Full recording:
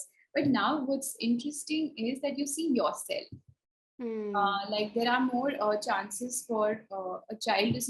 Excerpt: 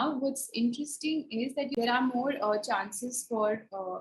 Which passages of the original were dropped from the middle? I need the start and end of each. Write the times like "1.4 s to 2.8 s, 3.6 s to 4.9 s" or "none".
2.4 s to 4.9 s